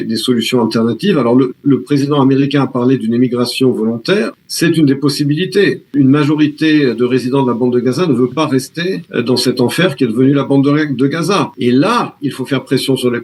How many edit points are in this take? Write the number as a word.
four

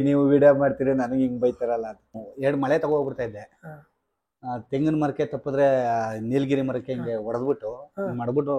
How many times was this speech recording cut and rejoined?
one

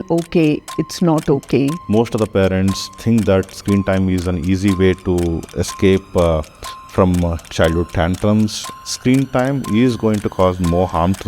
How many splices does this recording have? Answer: two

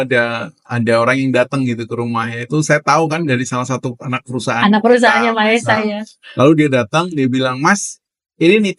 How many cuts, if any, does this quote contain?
zero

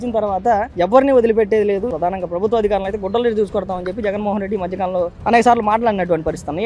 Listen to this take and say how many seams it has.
one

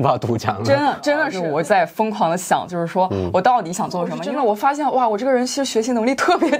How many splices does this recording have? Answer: two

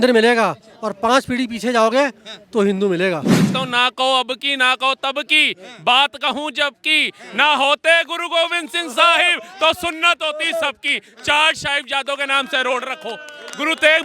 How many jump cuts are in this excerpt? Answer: one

